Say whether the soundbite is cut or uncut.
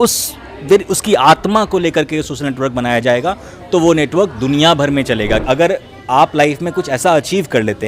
cut